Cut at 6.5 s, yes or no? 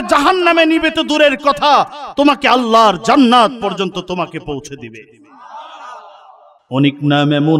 yes